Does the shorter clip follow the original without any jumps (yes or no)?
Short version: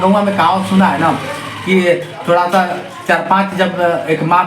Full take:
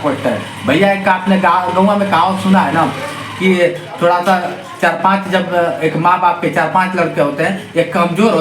yes